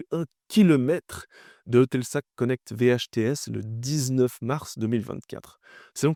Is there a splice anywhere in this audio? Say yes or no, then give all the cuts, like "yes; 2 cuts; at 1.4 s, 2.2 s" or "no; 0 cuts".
no; 0 cuts